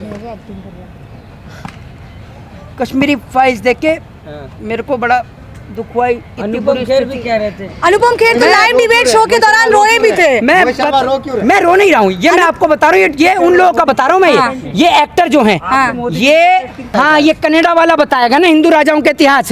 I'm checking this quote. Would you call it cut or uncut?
cut